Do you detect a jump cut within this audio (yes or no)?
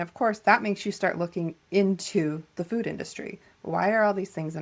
no